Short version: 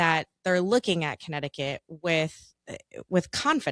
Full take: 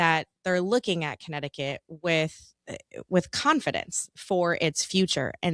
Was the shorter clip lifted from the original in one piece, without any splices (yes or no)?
yes